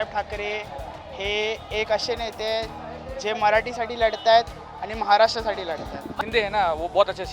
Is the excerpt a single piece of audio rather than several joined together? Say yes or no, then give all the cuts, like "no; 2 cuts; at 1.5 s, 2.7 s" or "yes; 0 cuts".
no; 1 cut; at 6.1 s